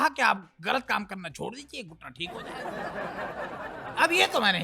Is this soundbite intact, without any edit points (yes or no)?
no